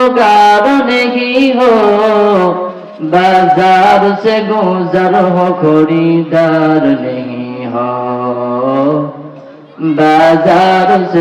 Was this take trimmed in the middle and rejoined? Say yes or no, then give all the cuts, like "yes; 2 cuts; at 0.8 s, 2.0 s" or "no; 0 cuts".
no; 0 cuts